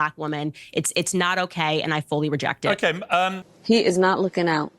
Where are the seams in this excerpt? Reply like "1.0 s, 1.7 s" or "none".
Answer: 3.5 s